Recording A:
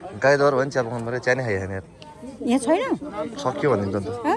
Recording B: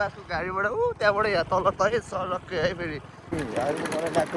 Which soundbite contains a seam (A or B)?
B